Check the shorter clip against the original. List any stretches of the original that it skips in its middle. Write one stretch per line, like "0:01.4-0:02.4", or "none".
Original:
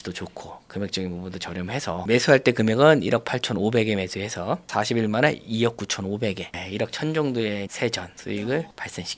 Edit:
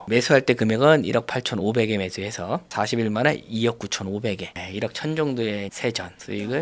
none